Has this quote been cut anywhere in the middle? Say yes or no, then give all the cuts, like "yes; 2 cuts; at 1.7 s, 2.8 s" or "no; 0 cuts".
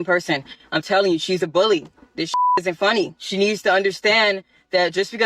yes; 1 cut; at 3.2 s